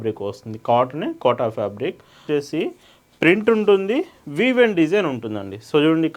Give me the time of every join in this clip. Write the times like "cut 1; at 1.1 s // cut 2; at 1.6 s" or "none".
cut 1; at 2.2 s